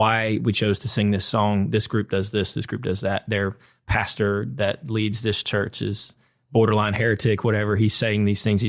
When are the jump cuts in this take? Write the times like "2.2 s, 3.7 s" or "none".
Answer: none